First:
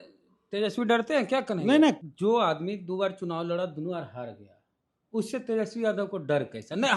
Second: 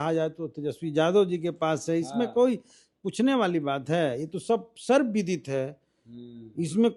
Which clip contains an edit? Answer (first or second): first